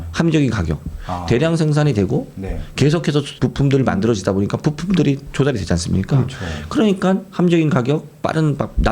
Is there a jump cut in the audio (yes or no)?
yes